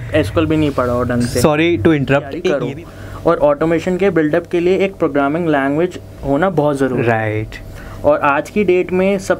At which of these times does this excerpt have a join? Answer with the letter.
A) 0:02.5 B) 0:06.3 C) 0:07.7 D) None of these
A